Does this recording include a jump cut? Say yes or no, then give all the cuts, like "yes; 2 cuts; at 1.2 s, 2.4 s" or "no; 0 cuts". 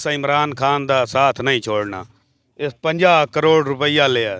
no; 0 cuts